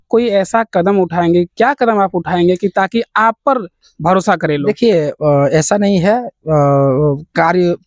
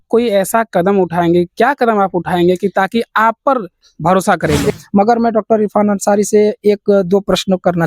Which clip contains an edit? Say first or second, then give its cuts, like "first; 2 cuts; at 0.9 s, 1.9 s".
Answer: second; 1 cut; at 4.8 s